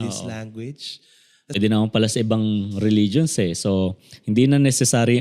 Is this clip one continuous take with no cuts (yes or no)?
no